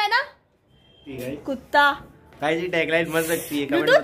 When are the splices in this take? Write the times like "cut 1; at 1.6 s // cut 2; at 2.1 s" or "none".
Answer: cut 1; at 1.1 s

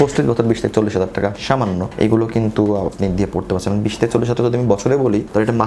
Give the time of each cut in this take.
none

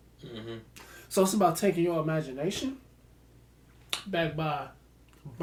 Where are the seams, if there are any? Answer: none

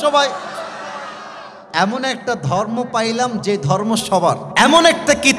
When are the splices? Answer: cut 1; at 4.5 s

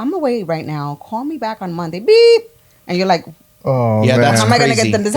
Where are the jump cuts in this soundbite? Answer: none

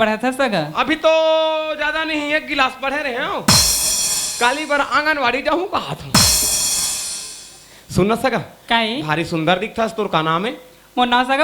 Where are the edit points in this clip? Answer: none

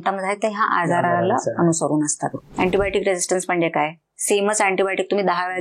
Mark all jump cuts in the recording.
cut 1; at 2.4 s

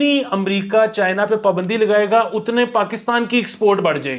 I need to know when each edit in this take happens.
none

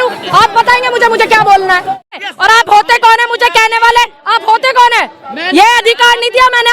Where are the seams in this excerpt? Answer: cut 1; at 2.2 s

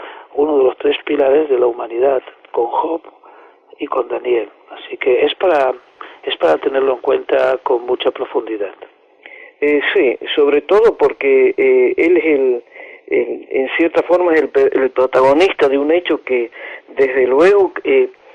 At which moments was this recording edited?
cut 1; at 3.2 s

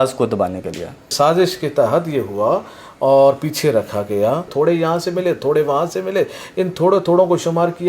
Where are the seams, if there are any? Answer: cut 1; at 1.1 s // cut 2; at 4.5 s

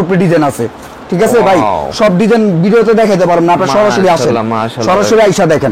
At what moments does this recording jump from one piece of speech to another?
none

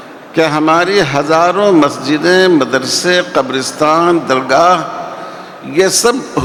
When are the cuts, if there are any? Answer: none

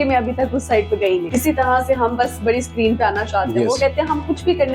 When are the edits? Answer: cut 1; at 1.2 s

